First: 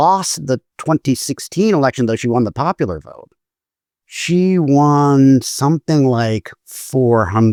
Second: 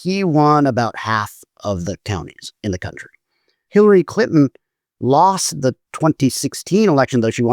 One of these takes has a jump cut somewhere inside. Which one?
second; 1 cut; at 3.5 s

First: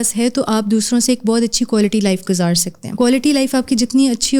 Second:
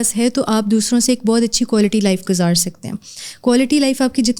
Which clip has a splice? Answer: first; 1 cut; at 2.8 s

